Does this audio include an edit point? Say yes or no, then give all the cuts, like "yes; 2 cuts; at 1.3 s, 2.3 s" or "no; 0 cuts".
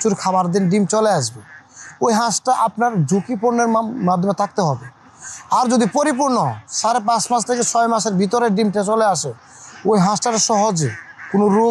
no; 0 cuts